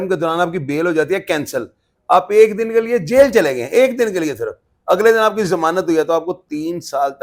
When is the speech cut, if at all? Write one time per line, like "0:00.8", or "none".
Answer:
none